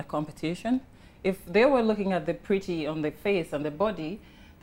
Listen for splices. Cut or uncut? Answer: uncut